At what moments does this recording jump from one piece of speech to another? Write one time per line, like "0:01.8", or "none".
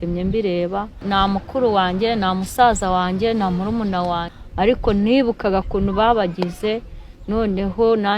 0:01.0
0:04.3